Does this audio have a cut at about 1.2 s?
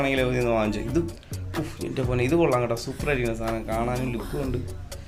yes; 1 cut; at 1.2 s

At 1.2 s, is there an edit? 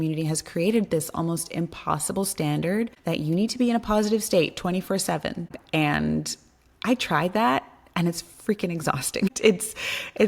no; 3 cuts; at 3.0 s, 5.5 s, 9.3 s

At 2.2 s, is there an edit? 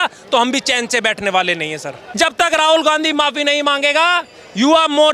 yes; 1 cut; at 2.2 s

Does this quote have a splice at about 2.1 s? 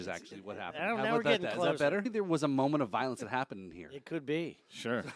yes; 1 cut; at 2.1 s

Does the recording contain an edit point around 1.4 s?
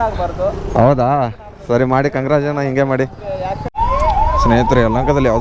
no; 1 cut; at 3.7 s

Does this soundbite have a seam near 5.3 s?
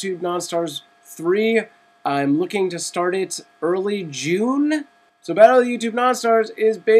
no; 0 cuts

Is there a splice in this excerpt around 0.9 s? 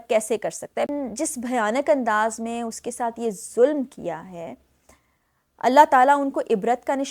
yes; 1 cut; at 0.9 s

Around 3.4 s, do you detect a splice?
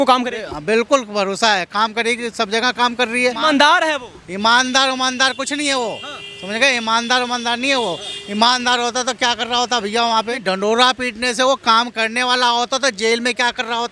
yes; 2 cuts; at 3.4 s, 10.4 s

